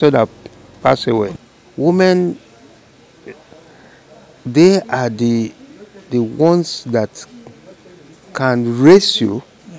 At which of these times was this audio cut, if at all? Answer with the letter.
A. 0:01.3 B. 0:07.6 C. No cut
A